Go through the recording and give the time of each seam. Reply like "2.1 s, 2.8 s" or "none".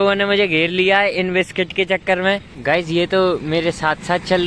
2.5 s